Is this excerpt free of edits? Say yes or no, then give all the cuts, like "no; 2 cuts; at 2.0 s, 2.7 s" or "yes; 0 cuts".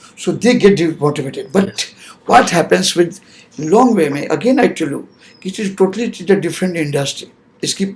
yes; 0 cuts